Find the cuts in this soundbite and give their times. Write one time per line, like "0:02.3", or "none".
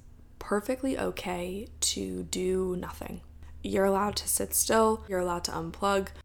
0:03.3
0:05.1